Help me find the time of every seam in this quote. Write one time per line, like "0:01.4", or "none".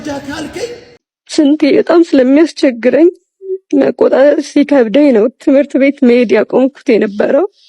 0:00.9